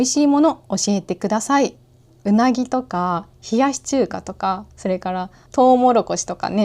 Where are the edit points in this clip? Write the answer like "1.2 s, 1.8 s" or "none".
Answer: 2.2 s, 5.4 s